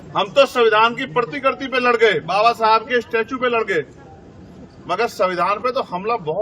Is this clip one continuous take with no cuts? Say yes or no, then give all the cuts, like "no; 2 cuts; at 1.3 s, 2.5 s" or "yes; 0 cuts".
yes; 0 cuts